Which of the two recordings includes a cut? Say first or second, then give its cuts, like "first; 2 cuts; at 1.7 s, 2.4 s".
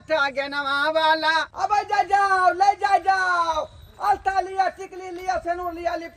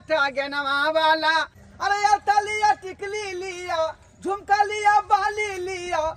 first; 1 cut; at 1.5 s